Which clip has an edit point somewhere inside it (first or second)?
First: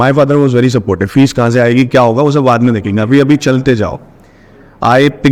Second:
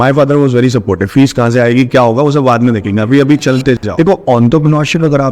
second